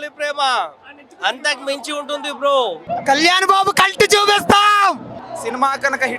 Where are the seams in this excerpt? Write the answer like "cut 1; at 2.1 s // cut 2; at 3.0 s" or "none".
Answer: cut 1; at 2.8 s // cut 2; at 5.1 s